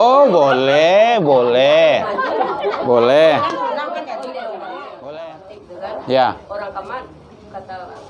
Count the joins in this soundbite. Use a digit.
1